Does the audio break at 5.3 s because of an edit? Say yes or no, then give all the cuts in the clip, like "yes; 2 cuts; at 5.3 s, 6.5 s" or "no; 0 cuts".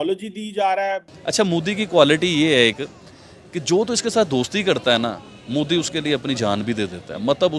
no; 1 cut; at 1.1 s